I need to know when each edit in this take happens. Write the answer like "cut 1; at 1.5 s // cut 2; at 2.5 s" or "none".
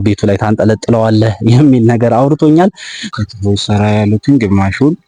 cut 1; at 3.0 s